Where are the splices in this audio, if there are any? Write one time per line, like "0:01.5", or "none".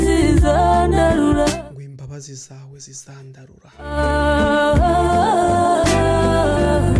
none